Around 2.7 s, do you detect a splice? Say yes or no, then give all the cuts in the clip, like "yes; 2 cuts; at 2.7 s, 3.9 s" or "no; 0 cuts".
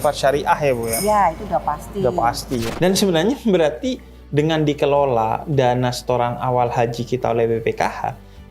yes; 1 cut; at 2.7 s